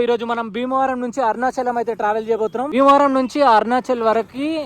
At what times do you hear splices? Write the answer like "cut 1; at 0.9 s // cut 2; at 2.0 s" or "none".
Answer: cut 1; at 2.7 s